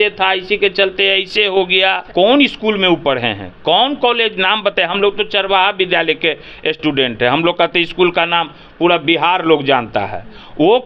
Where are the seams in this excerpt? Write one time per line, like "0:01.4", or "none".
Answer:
0:02.0